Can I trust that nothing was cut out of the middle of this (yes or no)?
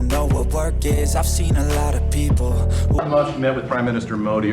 no